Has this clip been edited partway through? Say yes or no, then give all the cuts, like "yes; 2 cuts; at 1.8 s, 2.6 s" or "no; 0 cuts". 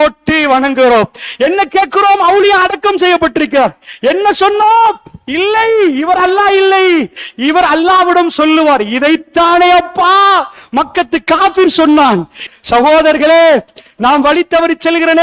yes; 2 cuts; at 12.4 s, 13.8 s